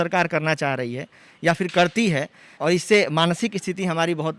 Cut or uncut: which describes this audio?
cut